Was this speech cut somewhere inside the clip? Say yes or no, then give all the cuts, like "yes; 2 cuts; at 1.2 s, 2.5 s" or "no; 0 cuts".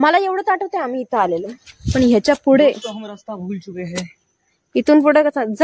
no; 0 cuts